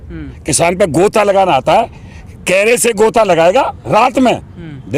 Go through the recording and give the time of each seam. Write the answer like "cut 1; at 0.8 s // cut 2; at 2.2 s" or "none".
none